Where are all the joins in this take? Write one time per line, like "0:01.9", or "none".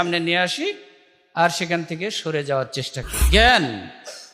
0:03.1